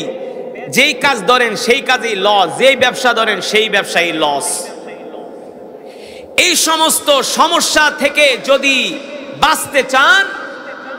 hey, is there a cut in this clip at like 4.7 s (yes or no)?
no